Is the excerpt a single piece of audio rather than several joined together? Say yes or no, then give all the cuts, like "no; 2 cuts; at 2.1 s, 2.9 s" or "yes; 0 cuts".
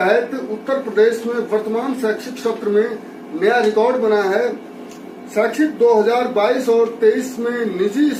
yes; 0 cuts